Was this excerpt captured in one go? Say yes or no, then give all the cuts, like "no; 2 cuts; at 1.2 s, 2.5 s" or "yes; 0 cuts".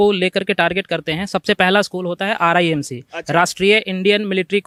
yes; 0 cuts